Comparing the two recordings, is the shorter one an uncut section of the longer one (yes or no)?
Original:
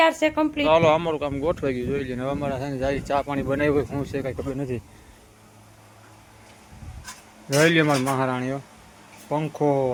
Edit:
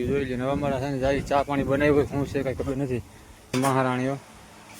no